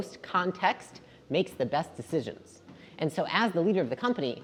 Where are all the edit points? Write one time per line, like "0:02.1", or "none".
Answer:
none